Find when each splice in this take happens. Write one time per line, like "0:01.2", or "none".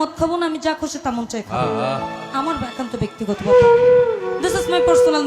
none